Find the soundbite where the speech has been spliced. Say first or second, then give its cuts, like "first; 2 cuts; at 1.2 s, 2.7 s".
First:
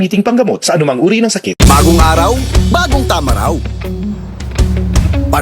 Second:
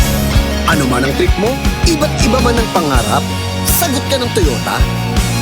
first; 1 cut; at 1.5 s